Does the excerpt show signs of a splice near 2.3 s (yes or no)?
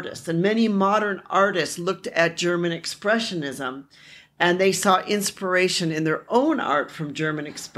no